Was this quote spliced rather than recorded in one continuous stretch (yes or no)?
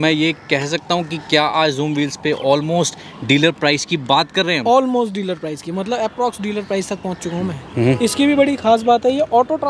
yes